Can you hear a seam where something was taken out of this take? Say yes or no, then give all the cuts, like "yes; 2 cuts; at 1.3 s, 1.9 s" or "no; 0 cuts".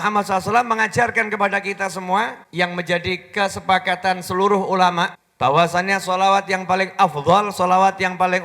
yes; 2 cuts; at 2.4 s, 5.2 s